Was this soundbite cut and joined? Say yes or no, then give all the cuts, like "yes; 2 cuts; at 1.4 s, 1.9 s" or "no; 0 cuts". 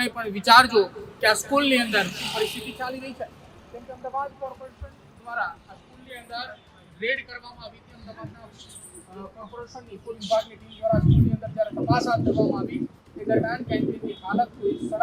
no; 0 cuts